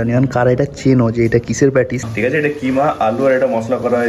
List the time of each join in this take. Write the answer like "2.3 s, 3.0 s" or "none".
2.1 s